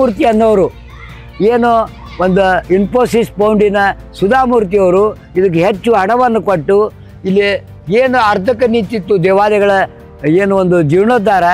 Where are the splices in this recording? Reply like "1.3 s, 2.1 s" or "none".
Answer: none